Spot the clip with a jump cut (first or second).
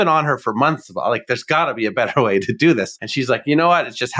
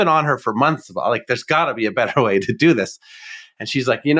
first